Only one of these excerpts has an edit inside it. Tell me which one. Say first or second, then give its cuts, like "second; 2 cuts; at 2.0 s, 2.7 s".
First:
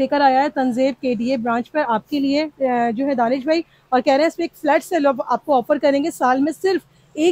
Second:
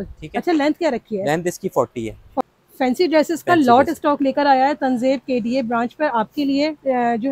second; 1 cut; at 2.4 s